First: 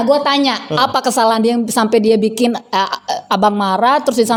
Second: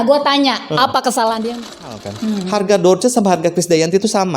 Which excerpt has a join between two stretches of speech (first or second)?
second